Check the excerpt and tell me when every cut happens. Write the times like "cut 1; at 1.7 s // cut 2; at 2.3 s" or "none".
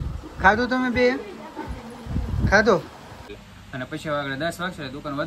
cut 1; at 3.3 s